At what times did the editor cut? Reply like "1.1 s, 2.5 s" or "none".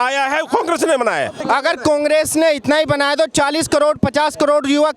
1.4 s